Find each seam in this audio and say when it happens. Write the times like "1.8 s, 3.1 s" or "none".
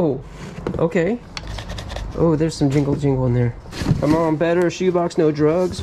1.4 s, 3.7 s